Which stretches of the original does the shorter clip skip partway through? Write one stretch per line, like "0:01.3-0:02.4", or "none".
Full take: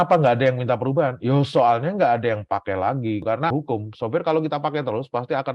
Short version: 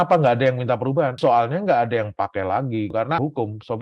0:01.2-0:01.5

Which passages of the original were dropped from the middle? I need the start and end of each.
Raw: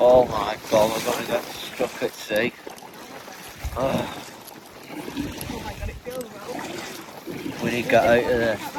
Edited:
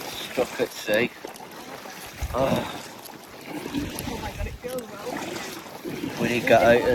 none

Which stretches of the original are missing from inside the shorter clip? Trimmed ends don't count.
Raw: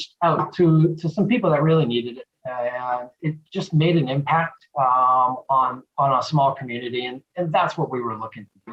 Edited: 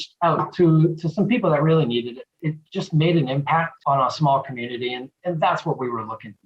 0:02.3-0:03.1
0:04.5-0:05.9

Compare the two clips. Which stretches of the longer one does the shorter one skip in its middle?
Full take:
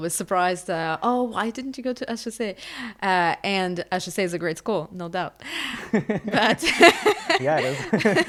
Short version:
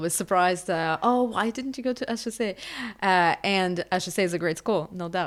none

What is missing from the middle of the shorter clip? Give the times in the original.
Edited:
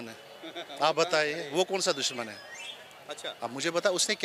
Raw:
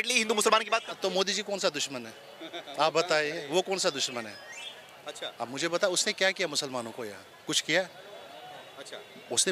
none

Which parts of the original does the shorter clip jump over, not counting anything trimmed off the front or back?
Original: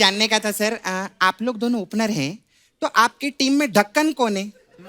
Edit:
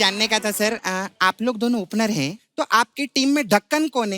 0:02.4-0:02.6

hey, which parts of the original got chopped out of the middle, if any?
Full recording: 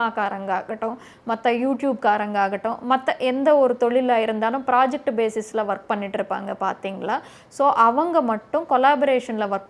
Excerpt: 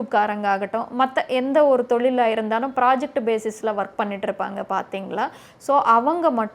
none

